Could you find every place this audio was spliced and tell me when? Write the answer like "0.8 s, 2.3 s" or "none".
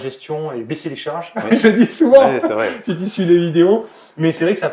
none